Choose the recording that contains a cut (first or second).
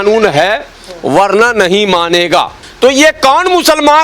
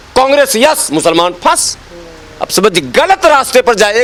first